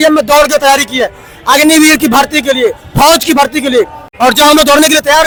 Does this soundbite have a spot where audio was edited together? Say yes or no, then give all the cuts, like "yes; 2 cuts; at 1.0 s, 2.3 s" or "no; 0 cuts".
no; 0 cuts